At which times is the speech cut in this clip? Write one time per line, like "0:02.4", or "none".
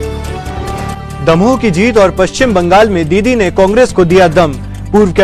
0:00.9